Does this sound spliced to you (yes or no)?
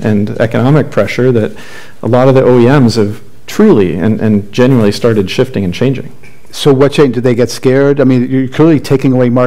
no